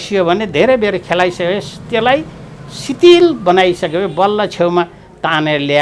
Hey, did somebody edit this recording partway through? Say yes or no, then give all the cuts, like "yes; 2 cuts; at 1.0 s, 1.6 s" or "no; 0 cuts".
no; 0 cuts